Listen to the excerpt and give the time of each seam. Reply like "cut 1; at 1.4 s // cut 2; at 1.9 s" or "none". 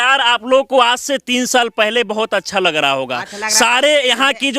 none